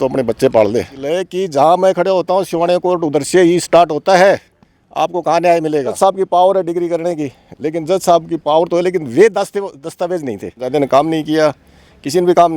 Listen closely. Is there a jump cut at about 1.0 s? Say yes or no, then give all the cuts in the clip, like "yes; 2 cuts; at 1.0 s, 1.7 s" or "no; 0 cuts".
yes; 3 cuts; at 1.0 s, 6.0 s, 10.6 s